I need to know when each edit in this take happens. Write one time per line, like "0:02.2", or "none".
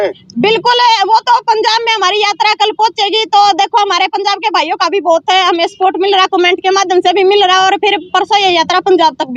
none